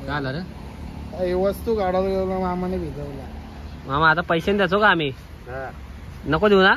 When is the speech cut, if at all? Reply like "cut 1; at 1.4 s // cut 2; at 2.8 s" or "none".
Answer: none